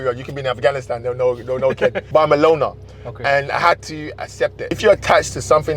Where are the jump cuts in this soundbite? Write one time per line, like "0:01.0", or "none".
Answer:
0:02.0
0:04.7

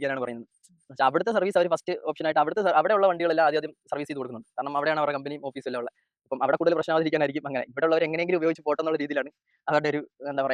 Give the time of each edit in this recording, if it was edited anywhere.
none

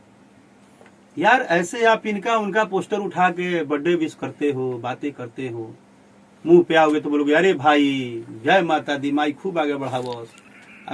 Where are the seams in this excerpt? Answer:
none

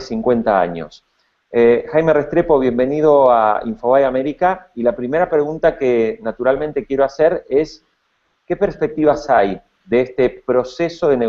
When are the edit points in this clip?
none

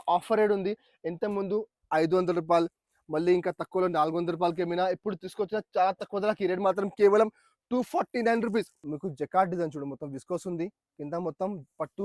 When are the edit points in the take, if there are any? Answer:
0:08.8

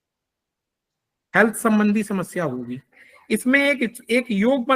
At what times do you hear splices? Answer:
0:03.1

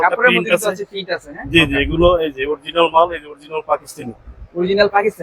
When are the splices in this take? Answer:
none

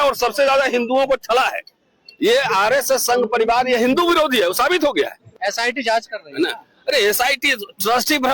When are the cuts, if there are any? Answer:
0:05.3

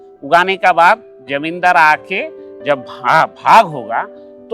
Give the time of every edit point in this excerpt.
none

